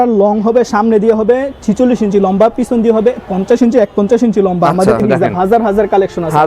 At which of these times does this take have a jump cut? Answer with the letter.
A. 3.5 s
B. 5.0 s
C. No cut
B